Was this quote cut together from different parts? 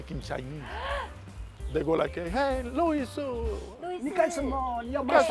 no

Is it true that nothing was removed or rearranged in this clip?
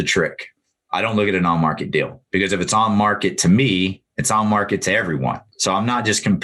no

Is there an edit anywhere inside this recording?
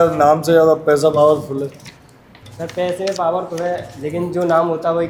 no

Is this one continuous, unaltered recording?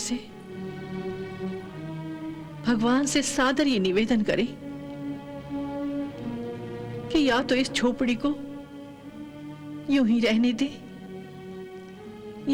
yes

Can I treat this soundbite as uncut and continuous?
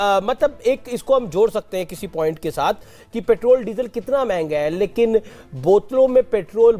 yes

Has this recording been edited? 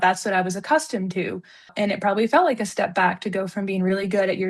yes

